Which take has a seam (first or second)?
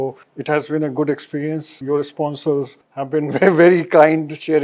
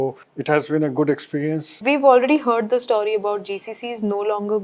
second